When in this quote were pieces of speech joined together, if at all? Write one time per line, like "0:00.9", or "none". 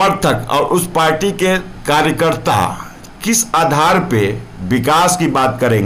none

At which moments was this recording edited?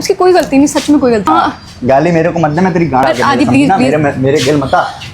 0:01.3
0:03.0

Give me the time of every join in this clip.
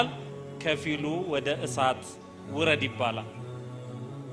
none

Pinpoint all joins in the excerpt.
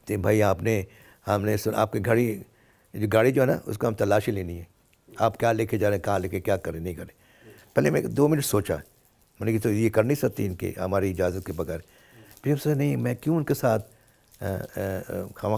none

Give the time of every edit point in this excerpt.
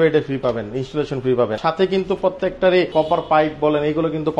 0:01.6
0:02.9

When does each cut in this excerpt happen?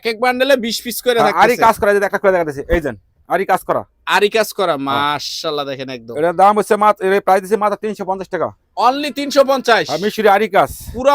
none

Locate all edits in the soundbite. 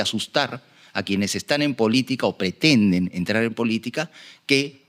none

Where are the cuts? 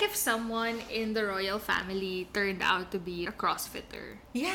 0:03.3

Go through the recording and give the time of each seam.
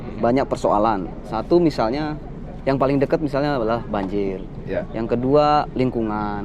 none

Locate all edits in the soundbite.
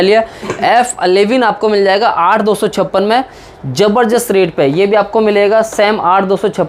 none

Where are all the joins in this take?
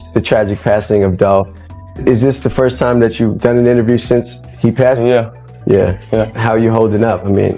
0:06.4

